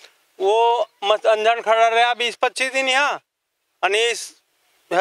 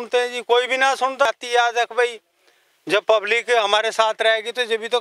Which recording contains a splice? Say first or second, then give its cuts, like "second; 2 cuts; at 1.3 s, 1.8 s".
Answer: second; 1 cut; at 1.3 s